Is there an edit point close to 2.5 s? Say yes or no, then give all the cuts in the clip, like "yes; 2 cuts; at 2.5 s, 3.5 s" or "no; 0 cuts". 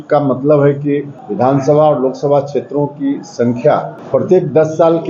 no; 2 cuts; at 1.2 s, 4.0 s